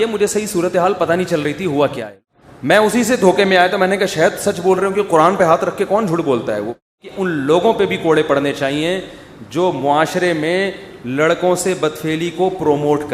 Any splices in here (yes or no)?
yes